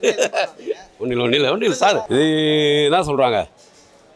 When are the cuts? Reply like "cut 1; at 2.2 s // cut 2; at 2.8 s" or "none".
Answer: cut 1; at 2.0 s